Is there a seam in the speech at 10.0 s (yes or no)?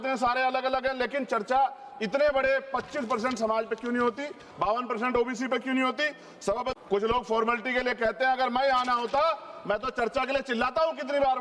no